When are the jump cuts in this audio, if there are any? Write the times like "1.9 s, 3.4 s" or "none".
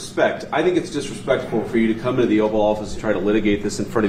none